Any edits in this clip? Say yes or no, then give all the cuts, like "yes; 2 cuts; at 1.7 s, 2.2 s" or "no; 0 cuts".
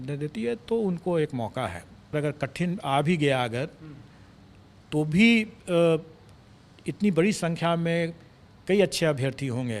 yes; 1 cut; at 2.1 s